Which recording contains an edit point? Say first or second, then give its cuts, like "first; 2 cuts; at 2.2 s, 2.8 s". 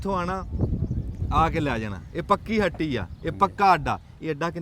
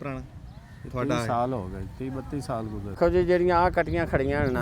second; 1 cut; at 3.0 s